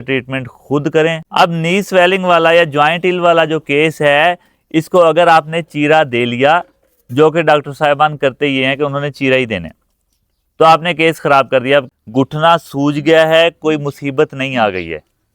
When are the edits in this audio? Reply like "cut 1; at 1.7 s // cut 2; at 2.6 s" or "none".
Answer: cut 1; at 1.2 s // cut 2; at 11.9 s